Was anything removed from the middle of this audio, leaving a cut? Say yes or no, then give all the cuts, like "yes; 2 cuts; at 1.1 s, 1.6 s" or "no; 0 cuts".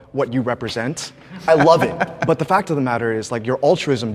yes; 1 cut; at 2.2 s